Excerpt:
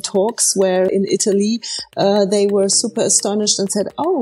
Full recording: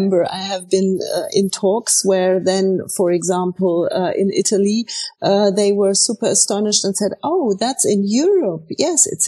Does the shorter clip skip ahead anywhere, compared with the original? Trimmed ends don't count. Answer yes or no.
yes